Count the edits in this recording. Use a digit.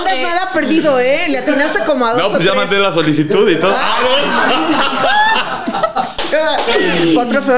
0